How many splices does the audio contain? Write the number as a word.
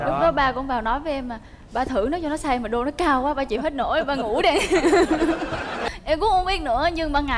one